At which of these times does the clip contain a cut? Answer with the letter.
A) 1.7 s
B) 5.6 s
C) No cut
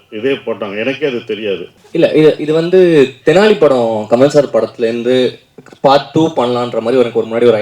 A